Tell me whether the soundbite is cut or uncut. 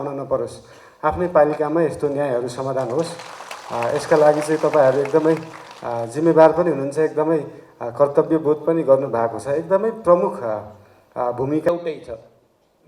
cut